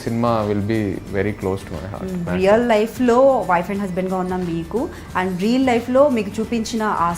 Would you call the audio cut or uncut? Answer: cut